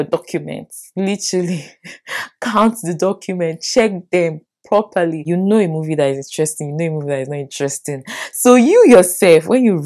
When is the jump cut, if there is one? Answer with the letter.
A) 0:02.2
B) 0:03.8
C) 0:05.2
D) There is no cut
C